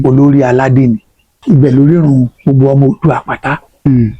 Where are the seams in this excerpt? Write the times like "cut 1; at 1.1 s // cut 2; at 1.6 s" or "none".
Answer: cut 1; at 1.3 s